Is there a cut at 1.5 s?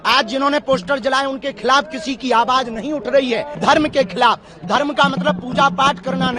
no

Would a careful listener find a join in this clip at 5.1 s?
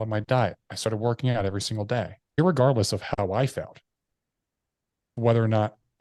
yes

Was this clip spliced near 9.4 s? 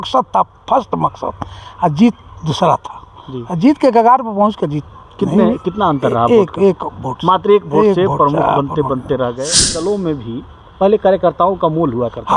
yes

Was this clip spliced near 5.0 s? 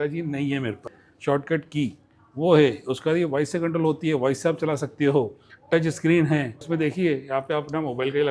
no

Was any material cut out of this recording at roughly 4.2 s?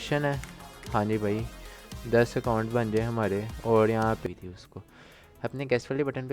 yes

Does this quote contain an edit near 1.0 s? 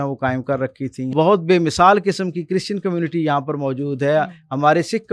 yes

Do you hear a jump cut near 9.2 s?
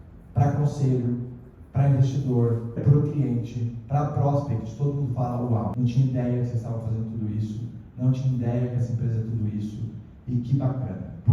no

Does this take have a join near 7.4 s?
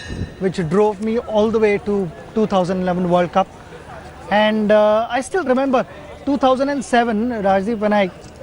yes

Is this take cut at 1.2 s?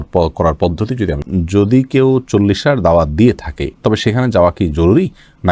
yes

